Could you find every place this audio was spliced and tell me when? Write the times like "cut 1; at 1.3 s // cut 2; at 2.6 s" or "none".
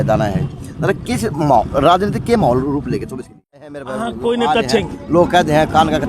cut 1; at 3.8 s